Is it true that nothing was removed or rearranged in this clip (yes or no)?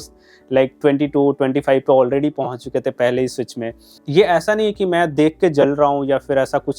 no